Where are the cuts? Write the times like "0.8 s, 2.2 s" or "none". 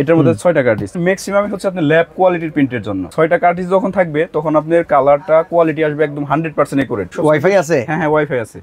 1.0 s, 3.1 s, 7.1 s